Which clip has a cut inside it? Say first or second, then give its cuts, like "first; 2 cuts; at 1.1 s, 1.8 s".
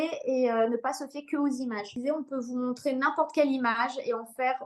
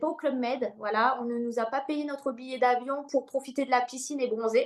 first; 1 cut; at 2.0 s